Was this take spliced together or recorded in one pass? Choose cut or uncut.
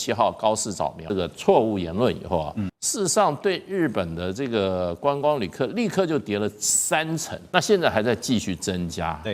cut